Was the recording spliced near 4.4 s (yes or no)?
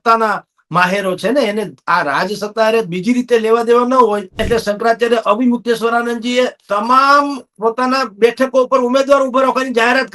yes